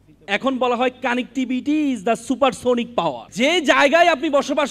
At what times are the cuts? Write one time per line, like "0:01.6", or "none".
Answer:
0:03.2